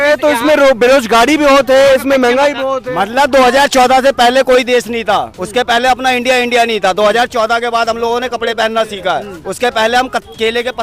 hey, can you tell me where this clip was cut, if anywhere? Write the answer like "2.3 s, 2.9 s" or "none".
none

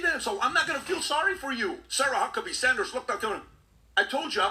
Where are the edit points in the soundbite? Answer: 1.8 s

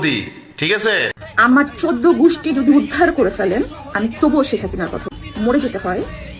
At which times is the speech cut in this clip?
1.3 s, 5.5 s

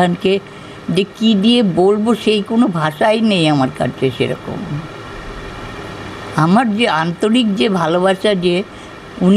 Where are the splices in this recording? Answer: none

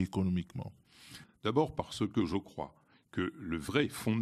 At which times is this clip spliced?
1.2 s

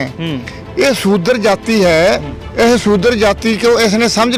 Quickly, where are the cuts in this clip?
none

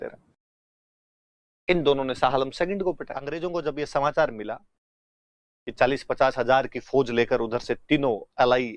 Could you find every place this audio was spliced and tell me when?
3.3 s

